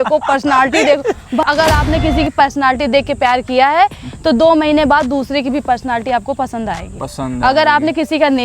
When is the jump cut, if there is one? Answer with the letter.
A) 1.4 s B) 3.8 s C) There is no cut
A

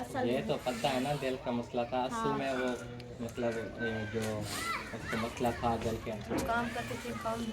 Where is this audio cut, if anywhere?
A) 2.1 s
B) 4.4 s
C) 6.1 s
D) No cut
C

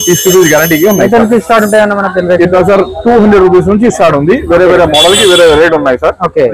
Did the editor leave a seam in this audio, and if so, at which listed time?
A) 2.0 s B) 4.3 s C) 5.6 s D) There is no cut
D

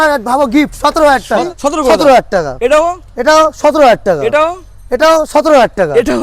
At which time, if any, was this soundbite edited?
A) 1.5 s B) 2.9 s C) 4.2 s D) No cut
A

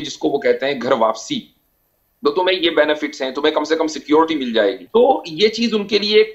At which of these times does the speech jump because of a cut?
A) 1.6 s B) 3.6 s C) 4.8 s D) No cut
C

